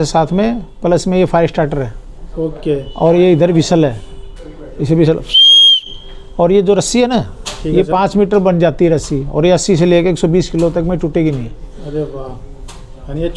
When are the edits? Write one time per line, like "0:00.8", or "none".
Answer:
none